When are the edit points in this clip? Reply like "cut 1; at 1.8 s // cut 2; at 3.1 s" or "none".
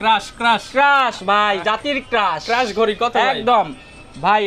none